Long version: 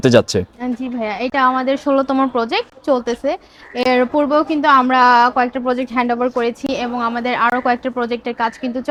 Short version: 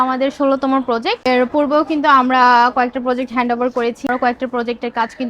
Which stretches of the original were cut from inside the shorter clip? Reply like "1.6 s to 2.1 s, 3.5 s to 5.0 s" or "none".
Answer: 2.7 s to 3.8 s, 6.7 s to 7.5 s